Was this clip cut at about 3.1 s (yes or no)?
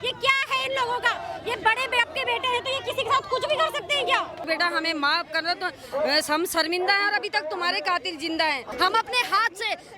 no